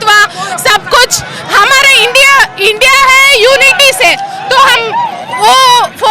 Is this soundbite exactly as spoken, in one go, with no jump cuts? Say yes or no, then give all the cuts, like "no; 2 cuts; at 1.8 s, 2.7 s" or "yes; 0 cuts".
yes; 0 cuts